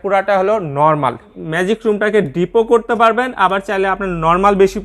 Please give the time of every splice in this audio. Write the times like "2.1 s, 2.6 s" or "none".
1.4 s